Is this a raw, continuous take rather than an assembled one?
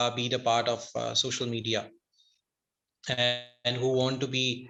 yes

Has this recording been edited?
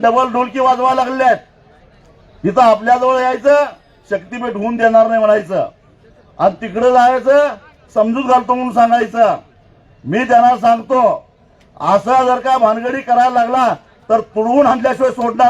no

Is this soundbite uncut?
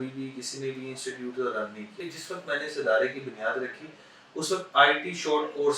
no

